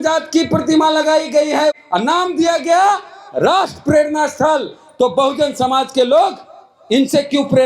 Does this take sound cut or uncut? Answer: cut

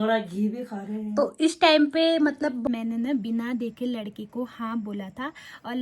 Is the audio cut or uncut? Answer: cut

